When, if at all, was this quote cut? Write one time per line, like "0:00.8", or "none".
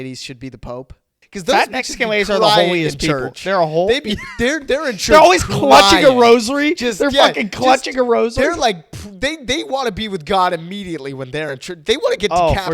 0:01.1